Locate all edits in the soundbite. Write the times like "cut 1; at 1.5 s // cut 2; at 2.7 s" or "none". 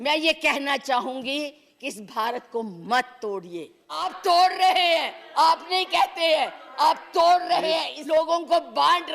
cut 1; at 4.1 s // cut 2; at 7.9 s